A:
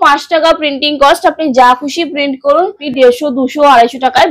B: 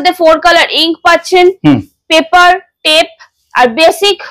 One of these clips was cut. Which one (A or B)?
A